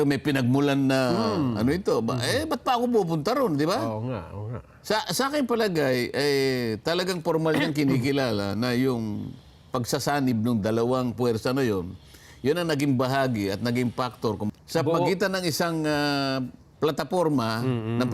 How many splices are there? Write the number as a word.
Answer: one